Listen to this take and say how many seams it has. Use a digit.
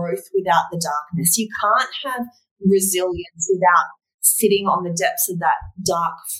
0